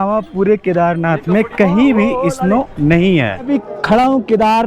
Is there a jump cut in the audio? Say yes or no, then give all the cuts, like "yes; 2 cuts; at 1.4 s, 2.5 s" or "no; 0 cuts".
yes; 1 cut; at 3.5 s